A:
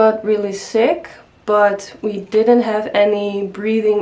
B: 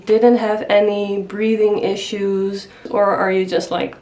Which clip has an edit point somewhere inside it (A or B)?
B